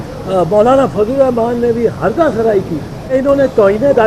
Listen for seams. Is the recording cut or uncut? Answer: cut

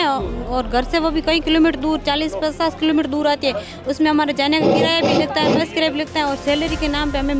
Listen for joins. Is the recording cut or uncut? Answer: uncut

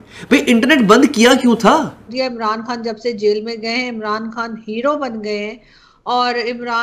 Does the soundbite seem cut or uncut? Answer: cut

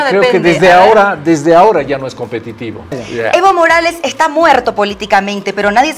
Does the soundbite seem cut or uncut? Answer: cut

